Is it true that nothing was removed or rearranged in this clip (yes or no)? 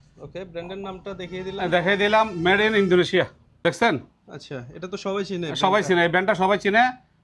no